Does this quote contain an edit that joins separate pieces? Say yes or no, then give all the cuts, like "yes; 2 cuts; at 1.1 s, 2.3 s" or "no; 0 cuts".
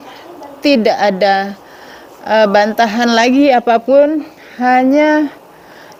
no; 0 cuts